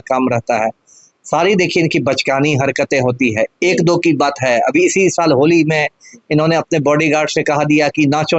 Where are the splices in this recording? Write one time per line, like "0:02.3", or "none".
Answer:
none